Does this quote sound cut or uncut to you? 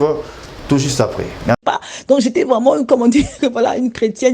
cut